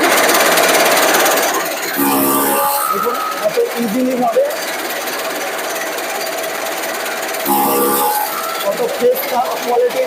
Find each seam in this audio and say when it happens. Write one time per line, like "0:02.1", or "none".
none